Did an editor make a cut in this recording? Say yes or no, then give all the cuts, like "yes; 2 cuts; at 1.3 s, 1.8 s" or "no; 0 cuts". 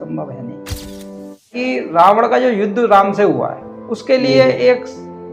yes; 1 cut; at 1.5 s